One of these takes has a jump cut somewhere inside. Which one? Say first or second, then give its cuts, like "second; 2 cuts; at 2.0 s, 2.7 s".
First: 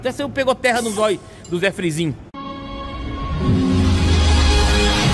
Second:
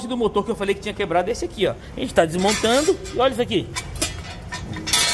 first; 1 cut; at 2.3 s